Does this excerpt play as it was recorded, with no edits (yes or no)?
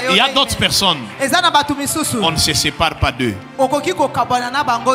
yes